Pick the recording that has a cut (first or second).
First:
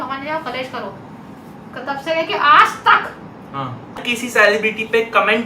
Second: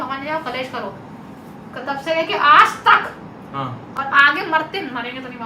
first